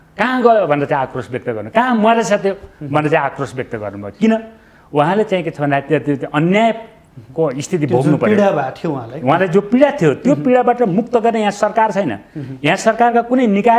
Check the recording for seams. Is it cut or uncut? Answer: uncut